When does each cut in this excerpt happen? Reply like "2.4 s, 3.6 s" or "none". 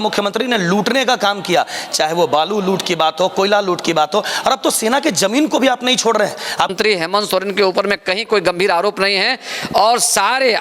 6.7 s